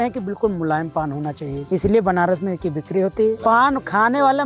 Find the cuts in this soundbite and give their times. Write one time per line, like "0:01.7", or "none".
0:01.5
0:03.4